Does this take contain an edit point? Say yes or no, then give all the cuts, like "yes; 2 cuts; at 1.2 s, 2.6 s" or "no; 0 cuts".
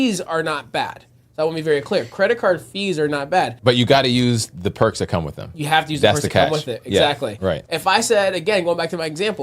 yes; 2 cuts; at 3.6 s, 7.6 s